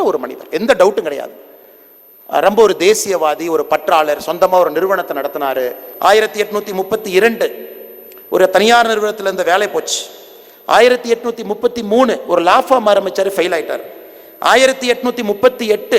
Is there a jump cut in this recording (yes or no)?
yes